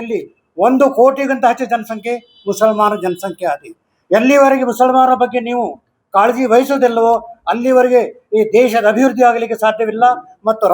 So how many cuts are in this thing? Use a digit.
0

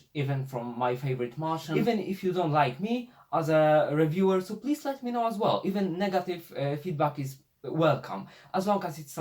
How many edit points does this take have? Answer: 1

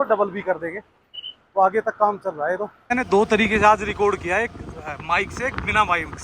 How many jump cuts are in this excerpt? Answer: 1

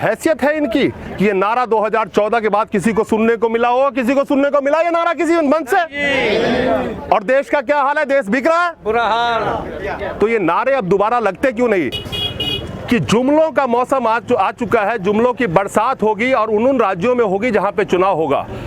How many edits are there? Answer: 1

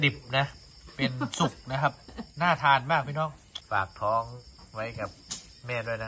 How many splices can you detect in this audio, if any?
1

